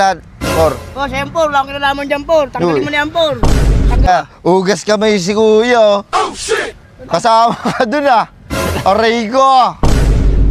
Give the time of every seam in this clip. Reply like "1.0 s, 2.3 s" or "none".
4.1 s